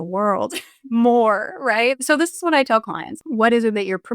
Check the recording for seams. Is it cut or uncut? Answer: cut